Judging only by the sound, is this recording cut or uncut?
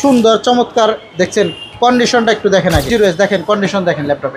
cut